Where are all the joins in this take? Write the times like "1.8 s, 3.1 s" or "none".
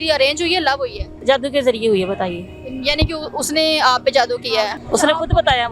1.2 s, 4.8 s